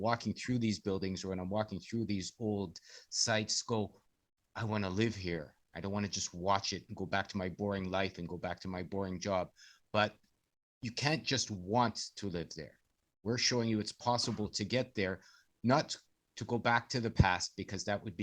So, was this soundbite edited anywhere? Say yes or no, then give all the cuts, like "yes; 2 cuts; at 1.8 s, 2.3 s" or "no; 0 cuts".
no; 0 cuts